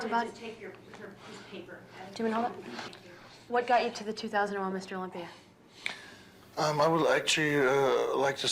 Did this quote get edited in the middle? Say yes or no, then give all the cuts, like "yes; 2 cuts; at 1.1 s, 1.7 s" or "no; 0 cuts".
yes; 1 cut; at 2.9 s